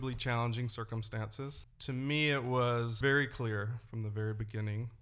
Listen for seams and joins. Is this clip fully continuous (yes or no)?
no